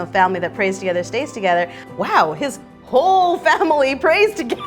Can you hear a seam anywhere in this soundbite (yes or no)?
yes